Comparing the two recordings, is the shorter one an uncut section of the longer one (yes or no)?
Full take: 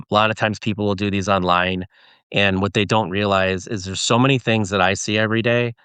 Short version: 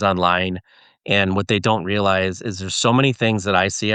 yes